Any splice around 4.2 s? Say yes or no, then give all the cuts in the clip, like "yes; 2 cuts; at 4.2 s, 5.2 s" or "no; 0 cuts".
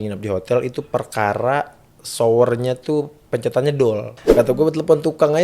yes; 1 cut; at 4.2 s